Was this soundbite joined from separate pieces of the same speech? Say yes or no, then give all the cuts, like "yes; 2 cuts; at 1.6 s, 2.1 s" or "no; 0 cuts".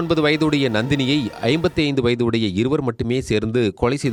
no; 0 cuts